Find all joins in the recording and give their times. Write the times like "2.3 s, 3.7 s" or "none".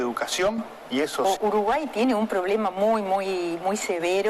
1.2 s